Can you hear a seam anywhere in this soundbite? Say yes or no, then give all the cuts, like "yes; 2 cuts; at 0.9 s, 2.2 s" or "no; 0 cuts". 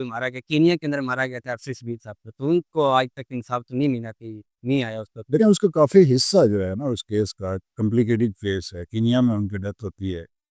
no; 0 cuts